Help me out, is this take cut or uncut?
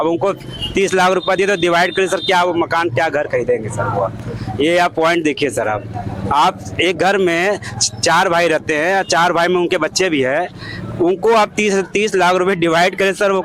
uncut